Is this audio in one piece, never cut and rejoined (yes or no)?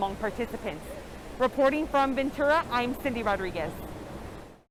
yes